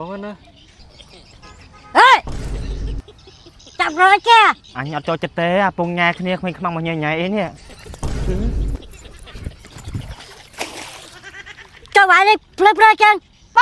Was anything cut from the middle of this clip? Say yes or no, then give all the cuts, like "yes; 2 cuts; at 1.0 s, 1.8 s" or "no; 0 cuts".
no; 0 cuts